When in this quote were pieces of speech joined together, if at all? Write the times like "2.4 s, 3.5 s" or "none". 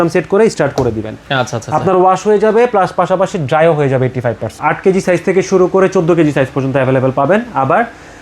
4.6 s